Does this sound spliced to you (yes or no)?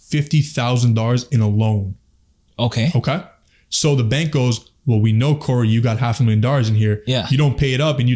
no